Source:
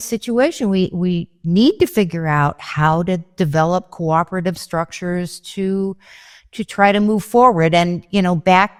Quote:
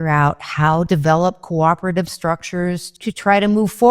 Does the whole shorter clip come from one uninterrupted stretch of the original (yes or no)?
no